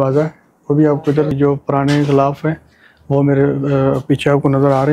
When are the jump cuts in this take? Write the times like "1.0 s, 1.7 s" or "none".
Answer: 1.3 s